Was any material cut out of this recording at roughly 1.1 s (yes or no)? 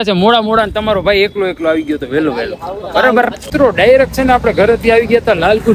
no